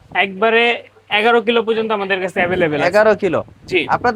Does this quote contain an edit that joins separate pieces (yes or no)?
no